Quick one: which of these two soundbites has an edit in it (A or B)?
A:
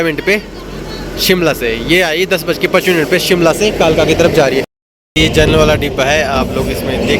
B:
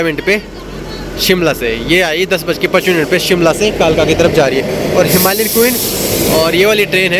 A